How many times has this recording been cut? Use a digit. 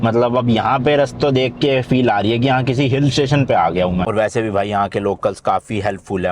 1